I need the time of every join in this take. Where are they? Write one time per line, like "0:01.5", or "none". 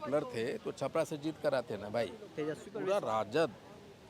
0:02.7